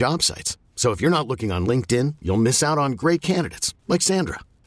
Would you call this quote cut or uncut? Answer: uncut